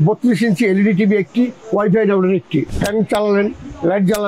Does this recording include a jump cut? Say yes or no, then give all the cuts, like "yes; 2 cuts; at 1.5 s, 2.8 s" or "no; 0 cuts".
yes; 1 cut; at 2.7 s